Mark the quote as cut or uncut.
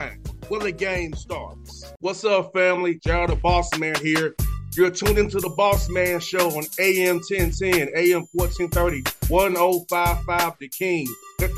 uncut